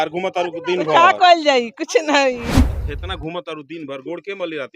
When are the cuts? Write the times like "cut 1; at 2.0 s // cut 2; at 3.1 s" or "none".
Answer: cut 1; at 2.5 s

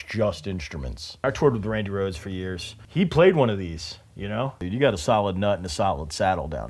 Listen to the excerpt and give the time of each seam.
cut 1; at 1.2 s // cut 2; at 4.6 s

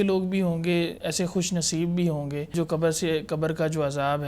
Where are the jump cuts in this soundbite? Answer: cut 1; at 1.0 s // cut 2; at 2.5 s

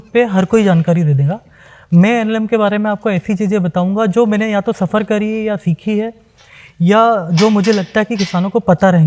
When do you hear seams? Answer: none

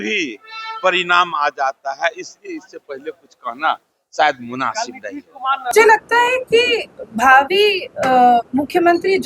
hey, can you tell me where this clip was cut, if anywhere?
cut 1; at 5.6 s

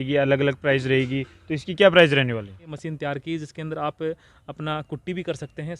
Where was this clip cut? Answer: cut 1; at 2.7 s

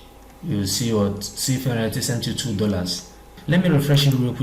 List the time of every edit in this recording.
cut 1; at 3.3 s

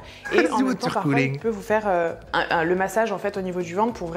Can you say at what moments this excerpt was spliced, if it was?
none

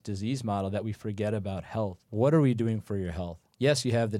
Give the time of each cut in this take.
cut 1; at 2.0 s

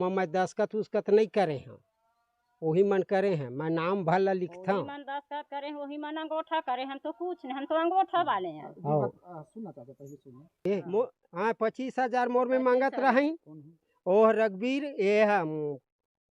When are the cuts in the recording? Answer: cut 1; at 10.5 s

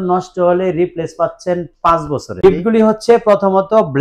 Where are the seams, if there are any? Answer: cut 1; at 2.4 s

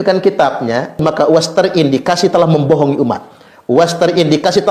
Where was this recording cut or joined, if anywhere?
cut 1; at 1.0 s

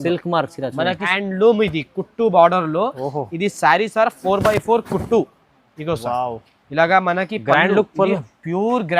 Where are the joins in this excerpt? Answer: cut 1; at 1.1 s

